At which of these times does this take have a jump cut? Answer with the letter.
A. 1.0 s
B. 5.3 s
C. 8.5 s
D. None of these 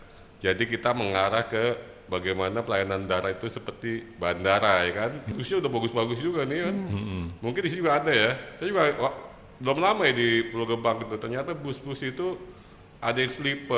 B